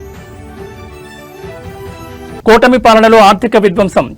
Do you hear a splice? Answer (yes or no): yes